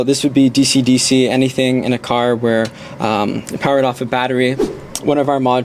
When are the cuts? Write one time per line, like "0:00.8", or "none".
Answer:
0:04.6